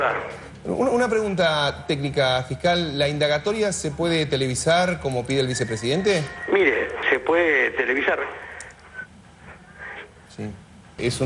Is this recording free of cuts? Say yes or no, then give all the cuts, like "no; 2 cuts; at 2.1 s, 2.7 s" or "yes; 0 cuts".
yes; 0 cuts